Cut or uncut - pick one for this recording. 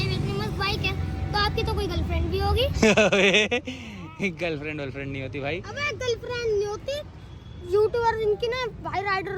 uncut